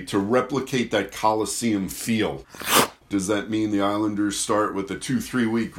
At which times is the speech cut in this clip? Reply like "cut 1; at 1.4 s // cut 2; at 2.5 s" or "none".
cut 1; at 3.0 s